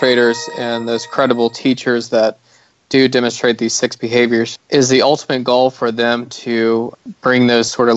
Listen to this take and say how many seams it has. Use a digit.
2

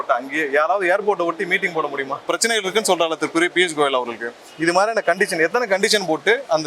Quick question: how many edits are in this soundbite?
1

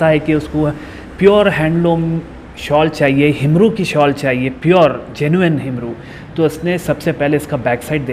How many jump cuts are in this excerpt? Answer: 0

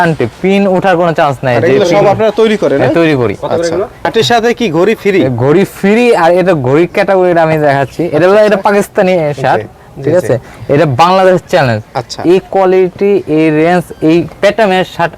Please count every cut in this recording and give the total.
1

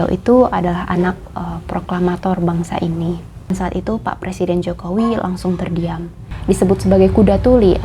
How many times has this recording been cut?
2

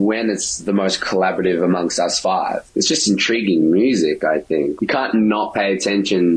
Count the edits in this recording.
1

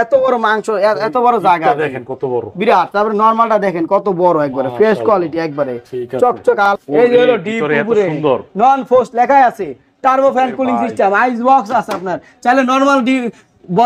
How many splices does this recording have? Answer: 1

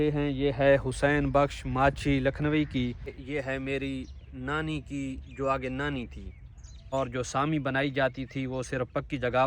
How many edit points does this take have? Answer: 2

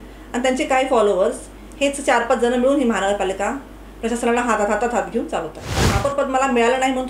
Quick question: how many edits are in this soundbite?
1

